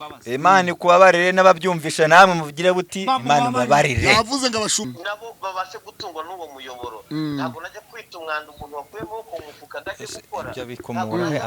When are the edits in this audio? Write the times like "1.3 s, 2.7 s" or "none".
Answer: 4.9 s